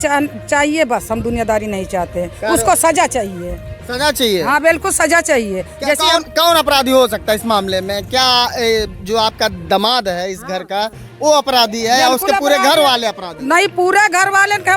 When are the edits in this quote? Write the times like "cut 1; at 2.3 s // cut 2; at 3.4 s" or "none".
cut 1; at 1.2 s